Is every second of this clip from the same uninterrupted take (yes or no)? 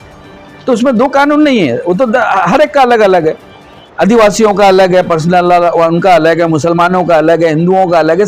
yes